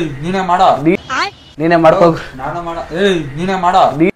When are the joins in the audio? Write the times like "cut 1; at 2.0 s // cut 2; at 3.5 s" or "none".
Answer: cut 1; at 1.0 s // cut 2; at 2.2 s